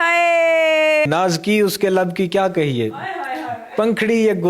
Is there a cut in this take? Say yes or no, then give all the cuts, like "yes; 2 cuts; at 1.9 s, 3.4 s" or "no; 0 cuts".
yes; 1 cut; at 1.1 s